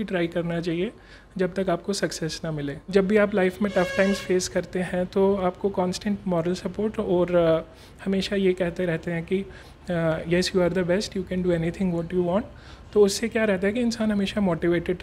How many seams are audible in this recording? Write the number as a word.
one